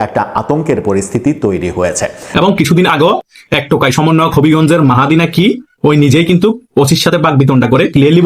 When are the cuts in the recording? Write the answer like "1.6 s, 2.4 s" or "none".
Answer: 2.2 s